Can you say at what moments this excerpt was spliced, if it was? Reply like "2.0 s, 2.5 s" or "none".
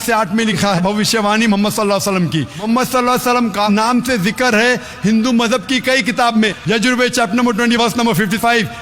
2.6 s, 6.6 s